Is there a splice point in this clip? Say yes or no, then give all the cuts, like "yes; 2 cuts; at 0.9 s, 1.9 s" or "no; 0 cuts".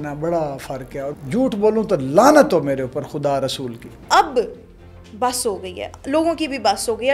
yes; 2 cuts; at 1.1 s, 4.0 s